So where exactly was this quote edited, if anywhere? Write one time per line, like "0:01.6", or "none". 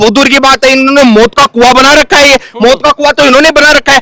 none